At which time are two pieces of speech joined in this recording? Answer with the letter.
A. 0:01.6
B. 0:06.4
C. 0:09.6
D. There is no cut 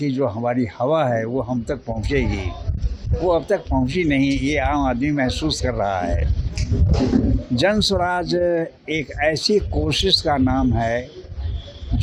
D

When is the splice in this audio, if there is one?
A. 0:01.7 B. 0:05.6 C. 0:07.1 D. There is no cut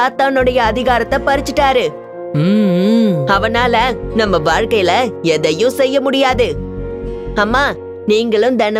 C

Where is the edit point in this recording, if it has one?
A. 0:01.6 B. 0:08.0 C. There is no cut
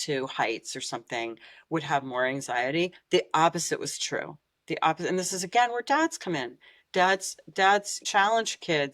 B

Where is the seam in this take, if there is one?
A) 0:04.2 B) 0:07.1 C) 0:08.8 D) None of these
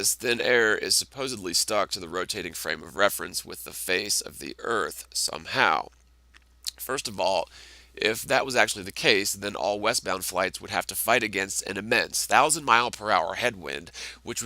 B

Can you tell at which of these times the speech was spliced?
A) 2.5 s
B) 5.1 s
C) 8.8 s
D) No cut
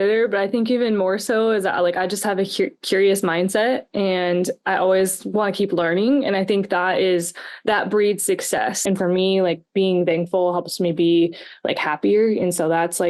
C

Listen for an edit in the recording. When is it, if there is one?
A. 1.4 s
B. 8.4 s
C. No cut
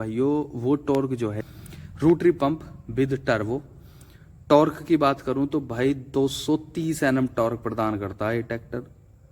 A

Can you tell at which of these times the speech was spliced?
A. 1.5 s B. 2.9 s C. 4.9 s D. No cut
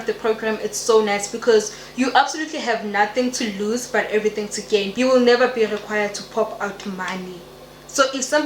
C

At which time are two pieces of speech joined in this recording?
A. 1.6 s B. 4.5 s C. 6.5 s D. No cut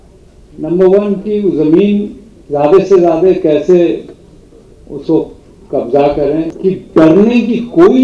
C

